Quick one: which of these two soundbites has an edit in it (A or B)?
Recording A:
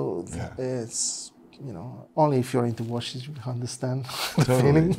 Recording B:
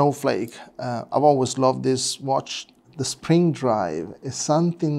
B